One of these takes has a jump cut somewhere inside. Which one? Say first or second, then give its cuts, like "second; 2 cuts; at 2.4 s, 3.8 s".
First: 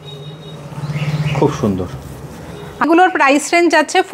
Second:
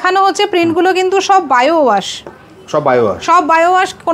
first; 1 cut; at 2.8 s